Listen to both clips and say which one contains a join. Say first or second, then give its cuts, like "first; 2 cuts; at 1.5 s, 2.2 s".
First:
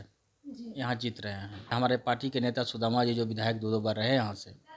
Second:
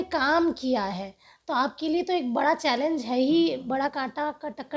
first; 1 cut; at 1.7 s